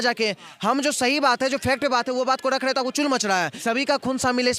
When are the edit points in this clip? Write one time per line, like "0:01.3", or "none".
0:03.5